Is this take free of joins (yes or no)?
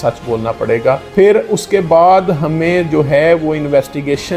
yes